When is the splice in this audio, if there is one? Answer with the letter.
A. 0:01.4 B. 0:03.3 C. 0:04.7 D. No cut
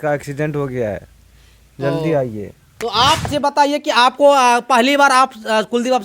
B